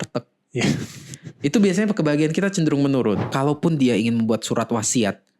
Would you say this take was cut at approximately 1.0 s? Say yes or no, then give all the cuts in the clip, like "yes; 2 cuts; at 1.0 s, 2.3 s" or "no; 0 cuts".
no; 1 cut; at 3.3 s